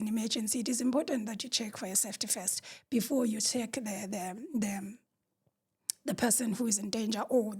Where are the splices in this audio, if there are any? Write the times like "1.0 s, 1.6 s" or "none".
none